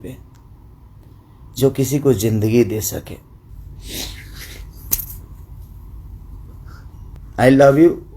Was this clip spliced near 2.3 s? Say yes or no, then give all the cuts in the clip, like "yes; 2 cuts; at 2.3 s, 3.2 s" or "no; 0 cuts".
no; 2 cuts; at 3.5 s, 7.2 s